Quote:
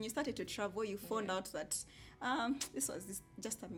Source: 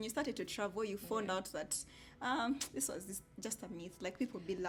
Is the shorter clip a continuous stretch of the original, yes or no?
yes